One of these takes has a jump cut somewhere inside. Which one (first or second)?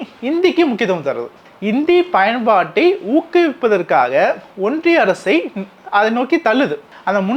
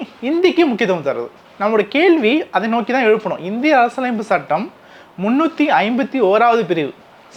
first